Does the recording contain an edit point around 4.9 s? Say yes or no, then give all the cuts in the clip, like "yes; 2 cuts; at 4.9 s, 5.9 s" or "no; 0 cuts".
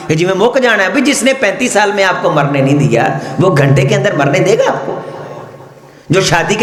no; 0 cuts